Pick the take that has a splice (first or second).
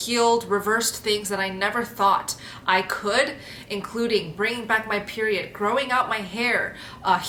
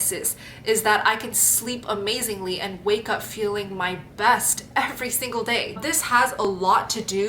second